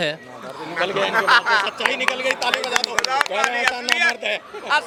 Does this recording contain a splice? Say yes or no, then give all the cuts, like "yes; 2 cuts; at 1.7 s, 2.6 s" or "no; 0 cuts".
no; 0 cuts